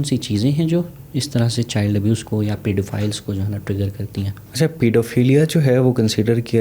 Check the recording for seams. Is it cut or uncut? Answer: uncut